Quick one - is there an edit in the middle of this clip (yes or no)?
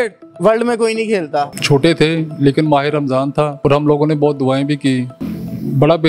yes